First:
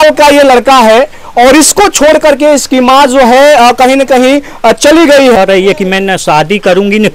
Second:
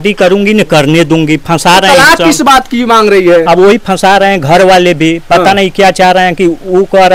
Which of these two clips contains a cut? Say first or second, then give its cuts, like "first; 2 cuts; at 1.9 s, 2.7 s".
first; 1 cut; at 5.4 s